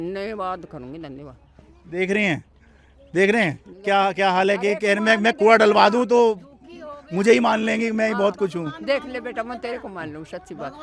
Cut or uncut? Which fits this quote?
uncut